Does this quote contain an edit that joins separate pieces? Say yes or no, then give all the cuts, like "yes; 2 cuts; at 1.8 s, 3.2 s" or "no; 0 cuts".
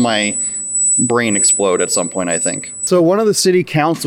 yes; 1 cut; at 2.7 s